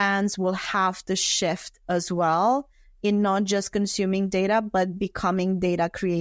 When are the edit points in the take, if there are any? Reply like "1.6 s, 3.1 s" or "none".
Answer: none